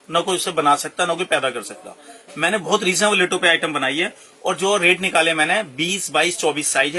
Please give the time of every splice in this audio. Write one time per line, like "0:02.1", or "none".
none